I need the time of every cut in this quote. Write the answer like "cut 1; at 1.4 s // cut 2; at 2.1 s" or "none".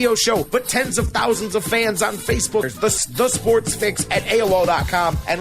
cut 1; at 2.7 s